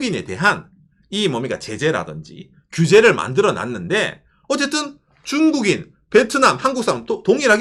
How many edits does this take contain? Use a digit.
0